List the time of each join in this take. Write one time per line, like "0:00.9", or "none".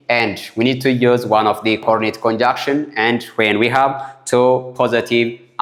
none